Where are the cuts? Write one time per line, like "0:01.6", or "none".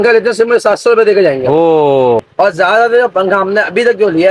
0:02.3